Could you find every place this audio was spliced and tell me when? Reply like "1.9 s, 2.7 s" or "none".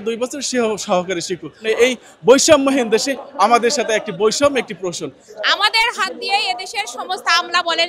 1.6 s, 5.2 s